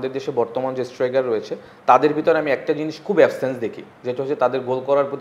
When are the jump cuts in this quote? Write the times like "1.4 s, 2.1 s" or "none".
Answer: none